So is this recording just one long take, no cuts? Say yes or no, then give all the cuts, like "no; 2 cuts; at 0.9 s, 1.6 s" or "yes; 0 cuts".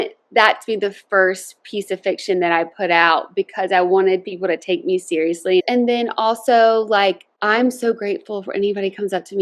no; 2 cuts; at 5.6 s, 7.3 s